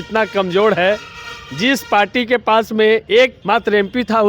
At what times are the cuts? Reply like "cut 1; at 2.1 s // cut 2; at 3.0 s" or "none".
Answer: cut 1; at 3.4 s